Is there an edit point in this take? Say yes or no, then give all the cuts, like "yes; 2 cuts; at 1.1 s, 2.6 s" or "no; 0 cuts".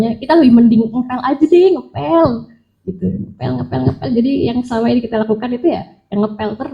no; 0 cuts